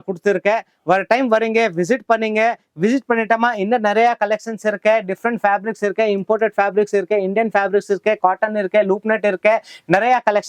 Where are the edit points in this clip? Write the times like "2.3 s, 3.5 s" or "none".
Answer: none